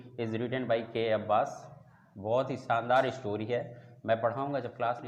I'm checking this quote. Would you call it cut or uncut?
uncut